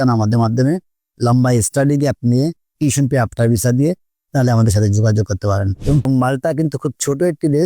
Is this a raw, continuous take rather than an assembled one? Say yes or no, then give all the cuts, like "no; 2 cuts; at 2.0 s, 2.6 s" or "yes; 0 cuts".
no; 1 cut; at 6.0 s